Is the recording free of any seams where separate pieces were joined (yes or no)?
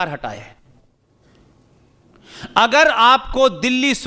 no